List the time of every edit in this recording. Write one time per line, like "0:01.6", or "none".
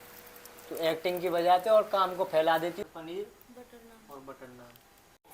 0:02.8